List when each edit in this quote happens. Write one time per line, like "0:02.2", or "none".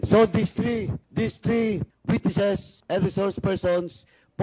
0:01.0
0:01.9
0:02.7